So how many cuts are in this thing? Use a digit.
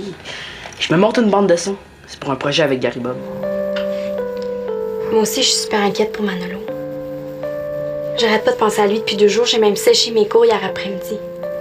1